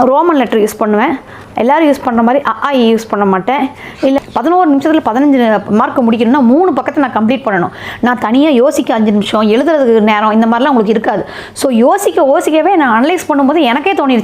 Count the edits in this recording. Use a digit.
1